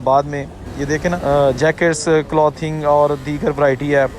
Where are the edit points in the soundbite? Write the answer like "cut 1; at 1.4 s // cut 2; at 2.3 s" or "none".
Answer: cut 1; at 1.2 s